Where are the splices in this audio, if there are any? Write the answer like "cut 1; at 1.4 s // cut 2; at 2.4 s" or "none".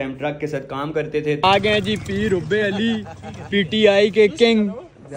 cut 1; at 1.4 s